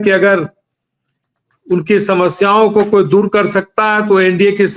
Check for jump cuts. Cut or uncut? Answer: uncut